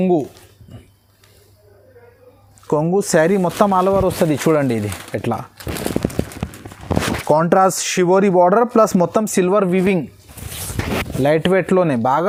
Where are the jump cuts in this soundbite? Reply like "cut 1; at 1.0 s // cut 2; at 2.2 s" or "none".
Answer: none